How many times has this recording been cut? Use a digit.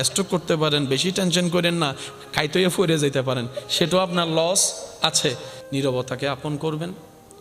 1